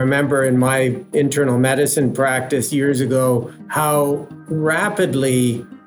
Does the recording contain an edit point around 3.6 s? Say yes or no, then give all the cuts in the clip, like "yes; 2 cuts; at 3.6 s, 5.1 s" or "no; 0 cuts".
yes; 2 cuts; at 3.6 s, 4.4 s